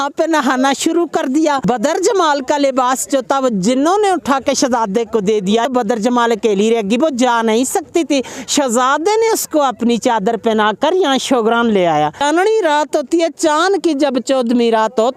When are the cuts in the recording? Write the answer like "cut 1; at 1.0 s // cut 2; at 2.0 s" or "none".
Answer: cut 1; at 1.6 s // cut 2; at 5.7 s // cut 3; at 12.2 s